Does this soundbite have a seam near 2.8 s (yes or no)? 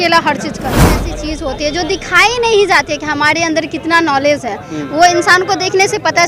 no